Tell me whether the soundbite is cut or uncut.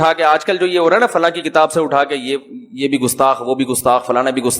uncut